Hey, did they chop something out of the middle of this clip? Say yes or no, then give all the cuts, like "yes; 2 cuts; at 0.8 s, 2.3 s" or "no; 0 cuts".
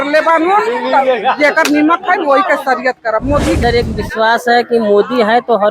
yes; 1 cut; at 3.6 s